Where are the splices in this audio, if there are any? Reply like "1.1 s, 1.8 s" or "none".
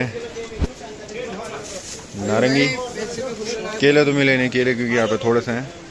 none